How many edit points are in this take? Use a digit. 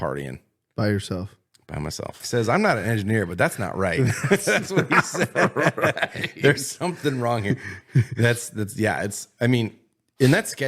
1